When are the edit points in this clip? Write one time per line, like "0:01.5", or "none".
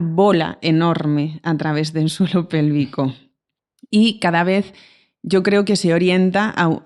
none